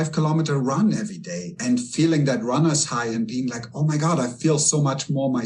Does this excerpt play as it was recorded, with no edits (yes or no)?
yes